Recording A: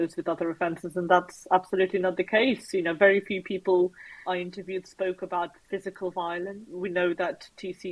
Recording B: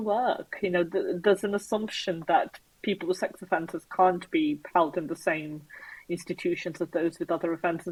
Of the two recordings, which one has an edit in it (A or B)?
A